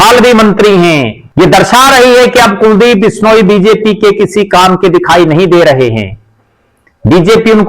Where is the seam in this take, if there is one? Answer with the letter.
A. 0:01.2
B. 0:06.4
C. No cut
A